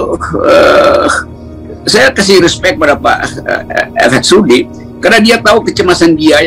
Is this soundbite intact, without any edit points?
yes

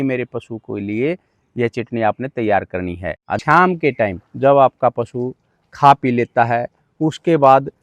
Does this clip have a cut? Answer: yes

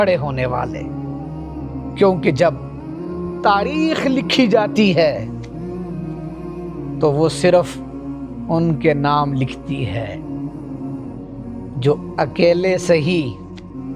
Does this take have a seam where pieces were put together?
yes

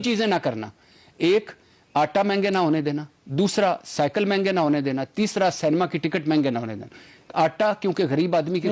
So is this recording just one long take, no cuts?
yes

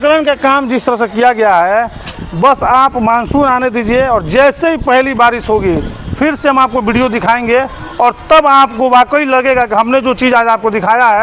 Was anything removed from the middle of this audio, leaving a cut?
no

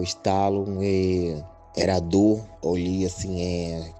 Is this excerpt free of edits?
no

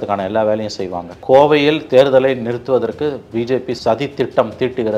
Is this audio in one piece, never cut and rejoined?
no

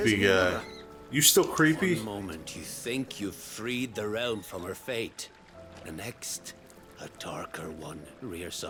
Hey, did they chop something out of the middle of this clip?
no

